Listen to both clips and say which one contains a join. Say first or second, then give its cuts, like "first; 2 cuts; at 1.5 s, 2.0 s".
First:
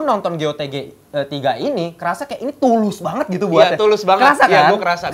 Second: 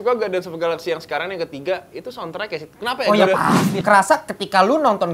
second; 1 cut; at 3.7 s